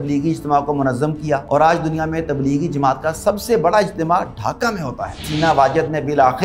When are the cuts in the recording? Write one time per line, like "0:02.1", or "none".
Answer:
0:01.4
0:05.3